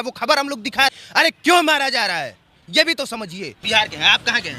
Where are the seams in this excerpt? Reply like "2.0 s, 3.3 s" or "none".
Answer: 1.0 s, 3.5 s